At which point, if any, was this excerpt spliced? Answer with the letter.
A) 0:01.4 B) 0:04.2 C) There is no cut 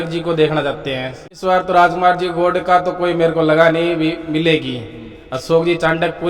A